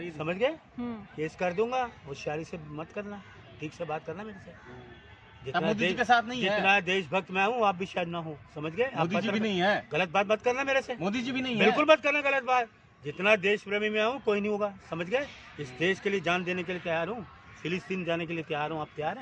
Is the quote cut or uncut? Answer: uncut